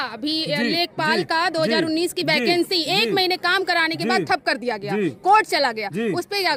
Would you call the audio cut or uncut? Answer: uncut